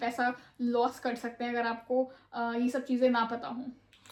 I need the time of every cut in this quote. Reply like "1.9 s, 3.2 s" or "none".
none